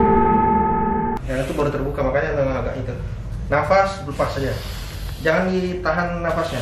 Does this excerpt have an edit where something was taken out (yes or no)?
yes